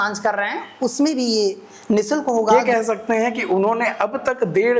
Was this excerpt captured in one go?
no; 1 cut; at 2.5 s

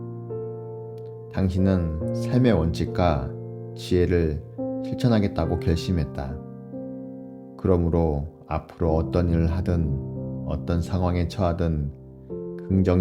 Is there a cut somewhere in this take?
yes; 1 cut; at 1.1 s

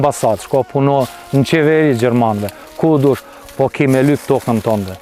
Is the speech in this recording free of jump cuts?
yes; 0 cuts

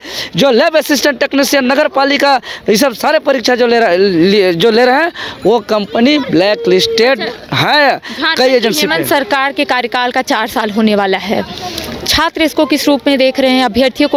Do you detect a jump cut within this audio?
no; 0 cuts

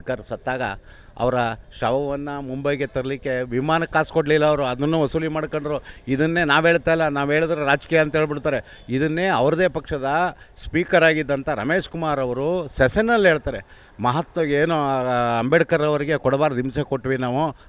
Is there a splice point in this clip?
no; 0 cuts

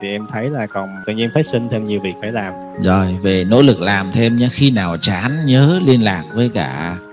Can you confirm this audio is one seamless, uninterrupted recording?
no; 2 cuts; at 1.0 s, 2.6 s

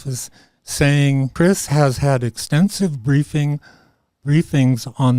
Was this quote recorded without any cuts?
no; 1 cut; at 1.3 s

